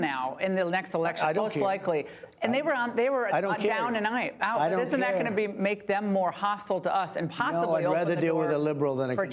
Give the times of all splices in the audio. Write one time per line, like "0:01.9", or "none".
none